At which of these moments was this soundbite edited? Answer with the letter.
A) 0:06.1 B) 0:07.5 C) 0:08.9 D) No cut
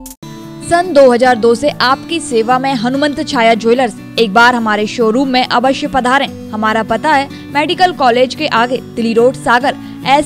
D